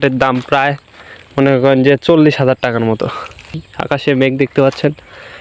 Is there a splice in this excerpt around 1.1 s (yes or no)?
no